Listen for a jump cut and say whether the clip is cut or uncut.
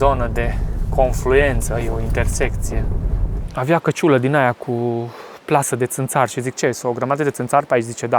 cut